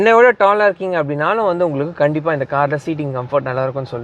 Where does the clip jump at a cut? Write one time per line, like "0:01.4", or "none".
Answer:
none